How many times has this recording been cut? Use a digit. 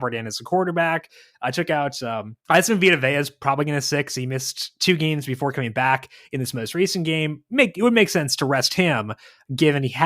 1